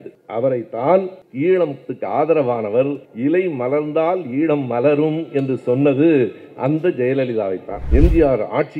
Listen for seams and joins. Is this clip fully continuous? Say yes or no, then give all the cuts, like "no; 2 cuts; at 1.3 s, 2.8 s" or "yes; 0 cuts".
no; 1 cut; at 7.8 s